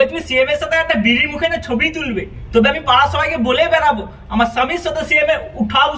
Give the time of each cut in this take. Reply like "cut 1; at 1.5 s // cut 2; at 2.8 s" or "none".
none